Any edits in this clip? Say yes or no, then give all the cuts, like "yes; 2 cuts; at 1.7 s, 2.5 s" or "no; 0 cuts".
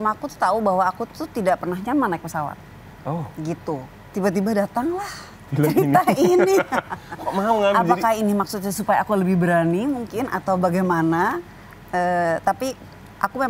no; 0 cuts